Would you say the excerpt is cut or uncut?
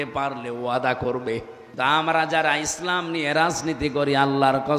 cut